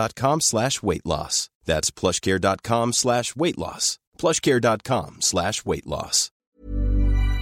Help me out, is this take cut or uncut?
cut